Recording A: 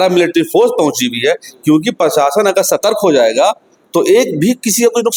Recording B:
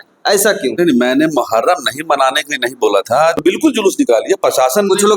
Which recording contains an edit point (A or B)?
B